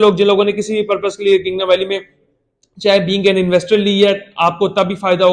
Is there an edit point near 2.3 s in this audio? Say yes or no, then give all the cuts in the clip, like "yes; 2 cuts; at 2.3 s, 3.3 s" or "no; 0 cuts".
no; 0 cuts